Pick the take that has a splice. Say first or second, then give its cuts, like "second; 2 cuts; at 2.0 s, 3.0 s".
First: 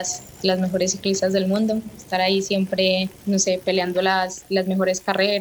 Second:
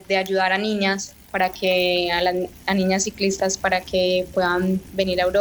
first; 1 cut; at 3.1 s